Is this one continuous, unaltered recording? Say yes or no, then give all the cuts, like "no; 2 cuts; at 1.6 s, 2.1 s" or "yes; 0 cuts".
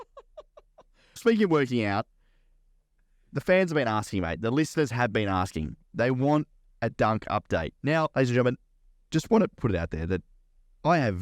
no; 3 cuts; at 1.2 s, 8.1 s, 9.6 s